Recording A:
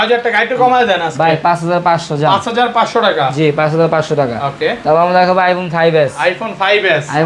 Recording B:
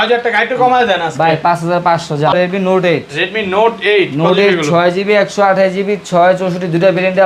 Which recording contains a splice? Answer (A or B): B